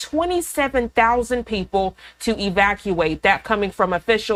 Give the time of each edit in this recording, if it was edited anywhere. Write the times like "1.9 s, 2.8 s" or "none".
none